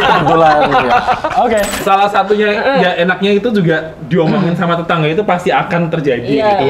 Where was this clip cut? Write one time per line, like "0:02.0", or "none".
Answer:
0:01.8